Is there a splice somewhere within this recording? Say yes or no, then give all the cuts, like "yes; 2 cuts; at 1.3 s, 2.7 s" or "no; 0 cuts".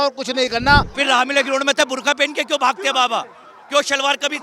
yes; 1 cut; at 0.9 s